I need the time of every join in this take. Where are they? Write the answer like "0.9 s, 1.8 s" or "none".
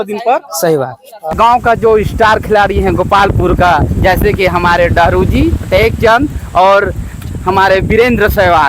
1.3 s

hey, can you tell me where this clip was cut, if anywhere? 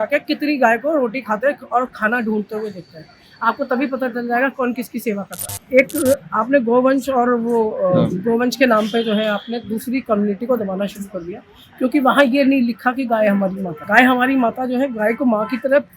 5.6 s, 13.7 s

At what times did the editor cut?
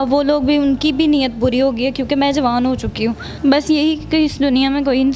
3.3 s

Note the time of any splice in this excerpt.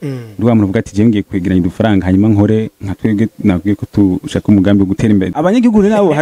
5.3 s

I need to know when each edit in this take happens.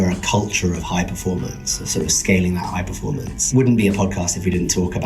3.3 s

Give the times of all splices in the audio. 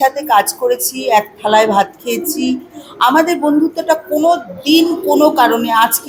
none

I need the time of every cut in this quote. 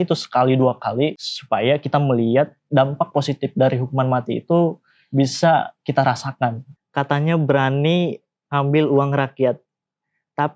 1.3 s, 6.6 s

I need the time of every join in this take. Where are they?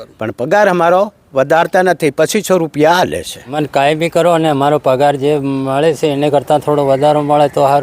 3.5 s

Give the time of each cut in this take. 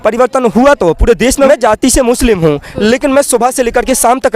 1.5 s

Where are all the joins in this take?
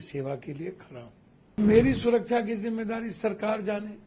1.6 s

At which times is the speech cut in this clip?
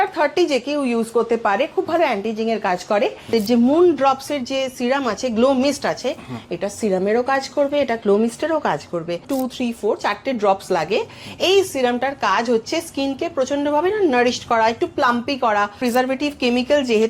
3.3 s, 9.3 s, 15.8 s

